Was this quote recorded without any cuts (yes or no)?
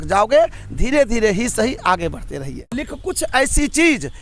no